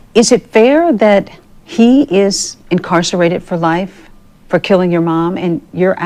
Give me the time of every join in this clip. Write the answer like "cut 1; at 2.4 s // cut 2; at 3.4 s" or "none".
none